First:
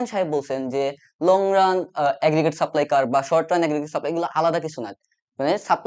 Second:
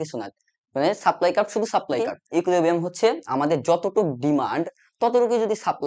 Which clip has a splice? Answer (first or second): second